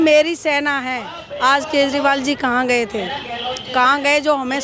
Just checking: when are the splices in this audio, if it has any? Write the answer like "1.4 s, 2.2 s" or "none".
none